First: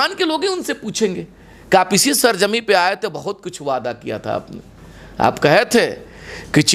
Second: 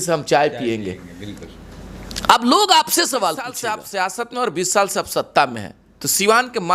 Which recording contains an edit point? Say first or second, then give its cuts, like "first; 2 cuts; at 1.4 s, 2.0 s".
second; 1 cut; at 3.7 s